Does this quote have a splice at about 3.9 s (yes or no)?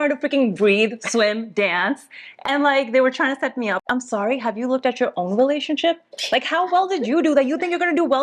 yes